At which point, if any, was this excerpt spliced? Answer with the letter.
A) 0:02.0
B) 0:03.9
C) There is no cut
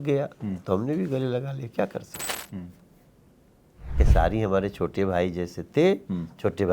B